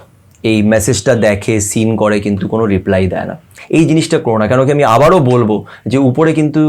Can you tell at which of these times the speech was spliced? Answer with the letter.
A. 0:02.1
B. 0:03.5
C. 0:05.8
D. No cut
B